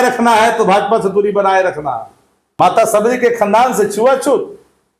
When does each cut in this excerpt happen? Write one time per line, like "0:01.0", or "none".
0:02.6